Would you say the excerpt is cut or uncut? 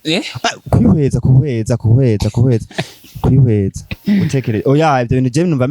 uncut